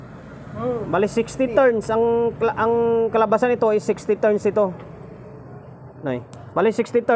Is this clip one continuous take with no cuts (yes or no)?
yes